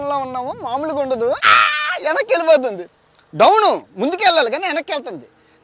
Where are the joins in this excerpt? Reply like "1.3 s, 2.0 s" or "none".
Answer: 1.5 s